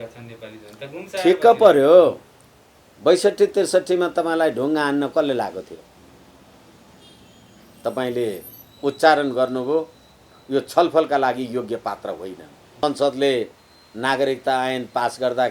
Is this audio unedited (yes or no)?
no